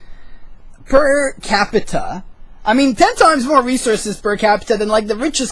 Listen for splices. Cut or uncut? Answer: cut